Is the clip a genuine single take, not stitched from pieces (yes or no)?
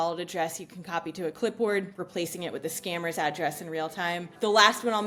yes